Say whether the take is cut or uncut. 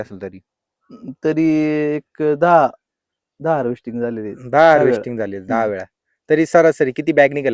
uncut